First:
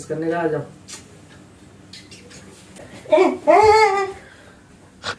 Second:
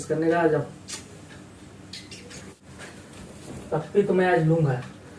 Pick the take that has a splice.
second; 1 cut; at 2.6 s

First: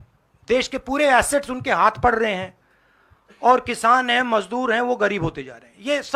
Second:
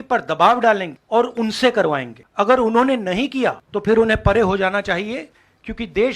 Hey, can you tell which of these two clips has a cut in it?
second; 3 cuts; at 0.9 s, 2.2 s, 3.7 s

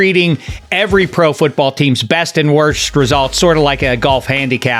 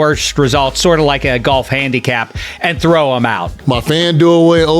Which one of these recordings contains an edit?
second; 1 cut; at 3.5 s

